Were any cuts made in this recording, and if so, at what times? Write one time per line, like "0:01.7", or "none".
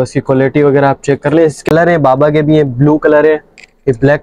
0:01.6